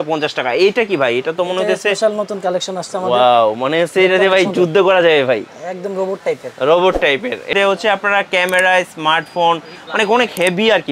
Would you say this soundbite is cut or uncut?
cut